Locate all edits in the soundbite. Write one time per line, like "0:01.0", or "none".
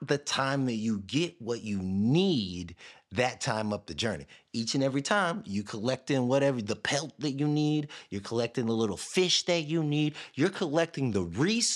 none